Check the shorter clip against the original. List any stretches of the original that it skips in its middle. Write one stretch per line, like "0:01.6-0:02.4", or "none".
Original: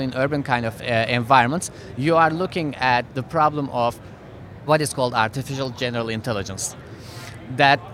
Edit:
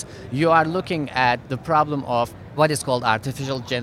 0:04.1-0:04.5